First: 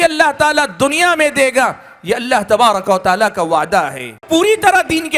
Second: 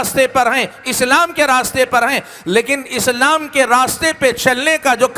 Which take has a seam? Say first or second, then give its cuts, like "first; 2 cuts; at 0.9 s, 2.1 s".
first; 1 cut; at 4.2 s